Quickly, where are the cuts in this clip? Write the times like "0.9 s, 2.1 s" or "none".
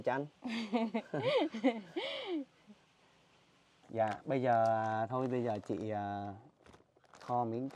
3.8 s